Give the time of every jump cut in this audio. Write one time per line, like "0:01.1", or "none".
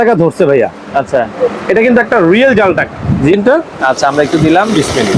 0:03.3